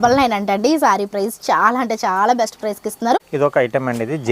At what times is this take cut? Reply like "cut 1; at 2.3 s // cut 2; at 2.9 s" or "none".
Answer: cut 1; at 3.2 s